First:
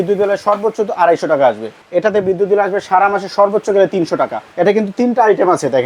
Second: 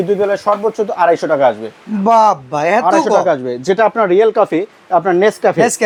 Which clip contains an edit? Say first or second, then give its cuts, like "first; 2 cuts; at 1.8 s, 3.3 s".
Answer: first; 2 cuts; at 1.8 s, 4.5 s